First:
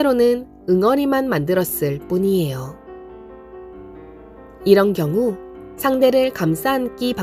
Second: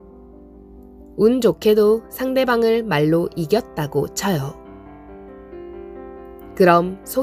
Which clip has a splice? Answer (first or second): first